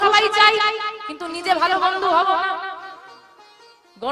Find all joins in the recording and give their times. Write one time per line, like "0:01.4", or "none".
none

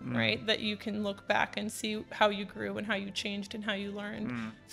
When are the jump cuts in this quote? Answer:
none

